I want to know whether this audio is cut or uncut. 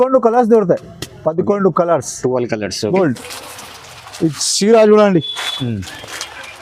cut